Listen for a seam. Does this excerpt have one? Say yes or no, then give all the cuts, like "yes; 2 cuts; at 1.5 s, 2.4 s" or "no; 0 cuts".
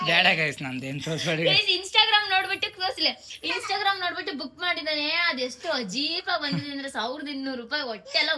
no; 0 cuts